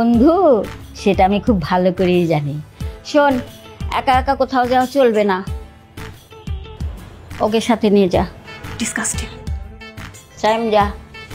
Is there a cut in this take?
no; 0 cuts

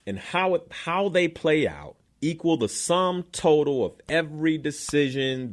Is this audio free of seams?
yes; 0 cuts

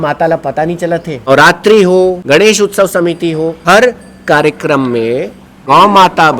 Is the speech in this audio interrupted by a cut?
yes; 4 cuts; at 1.3 s, 2.2 s, 3.6 s, 5.5 s

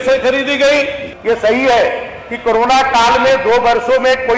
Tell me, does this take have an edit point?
yes; 1 cut; at 1.0 s

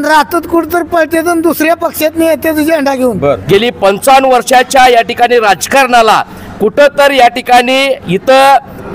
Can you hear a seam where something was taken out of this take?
yes; 1 cut; at 3.4 s

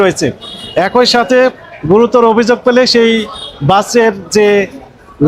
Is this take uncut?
yes; 0 cuts

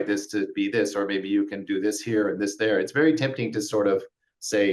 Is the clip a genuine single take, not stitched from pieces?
yes; 0 cuts

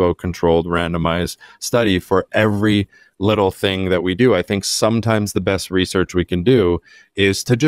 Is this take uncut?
yes; 0 cuts

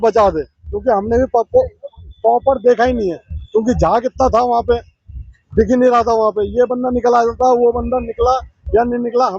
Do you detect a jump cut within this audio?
no; 0 cuts

